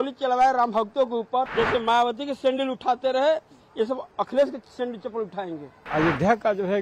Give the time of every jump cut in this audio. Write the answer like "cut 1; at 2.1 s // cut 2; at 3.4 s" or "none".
cut 1; at 1.5 s // cut 2; at 5.9 s